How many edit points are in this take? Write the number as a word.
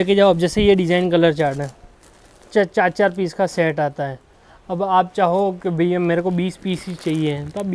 zero